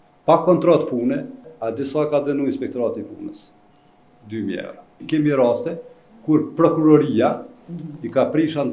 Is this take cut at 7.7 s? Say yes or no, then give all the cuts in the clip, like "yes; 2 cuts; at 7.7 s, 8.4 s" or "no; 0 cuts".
no; 2 cuts; at 1.5 s, 5.0 s